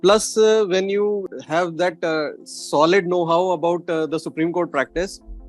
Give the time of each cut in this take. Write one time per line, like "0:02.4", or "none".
0:01.3